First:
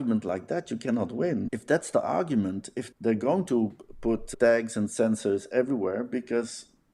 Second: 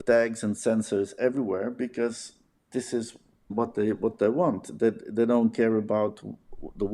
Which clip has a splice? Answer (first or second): second